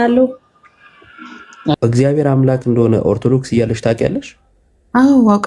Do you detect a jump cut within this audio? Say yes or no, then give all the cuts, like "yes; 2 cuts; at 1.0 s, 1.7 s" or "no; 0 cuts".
yes; 1 cut; at 1.7 s